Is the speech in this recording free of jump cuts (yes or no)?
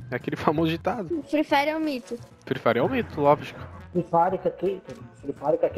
no